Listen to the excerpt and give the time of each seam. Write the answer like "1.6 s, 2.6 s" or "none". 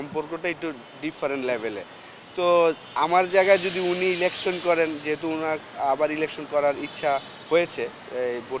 none